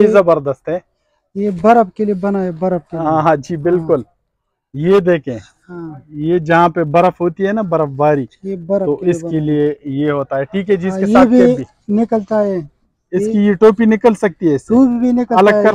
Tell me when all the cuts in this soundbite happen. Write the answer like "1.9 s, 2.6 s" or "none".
none